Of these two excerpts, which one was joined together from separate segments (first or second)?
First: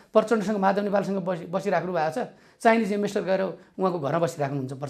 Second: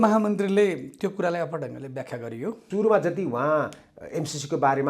second